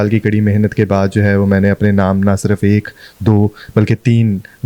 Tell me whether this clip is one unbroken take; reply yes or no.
yes